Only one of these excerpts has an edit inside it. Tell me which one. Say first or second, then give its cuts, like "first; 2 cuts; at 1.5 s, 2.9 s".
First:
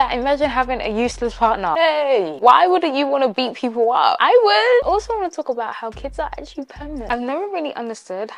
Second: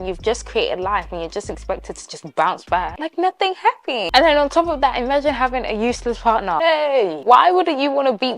first; 2 cuts; at 4.8 s, 7.1 s